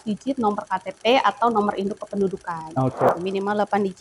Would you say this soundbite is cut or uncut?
cut